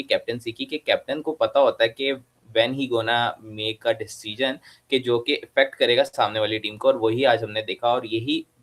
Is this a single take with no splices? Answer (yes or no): yes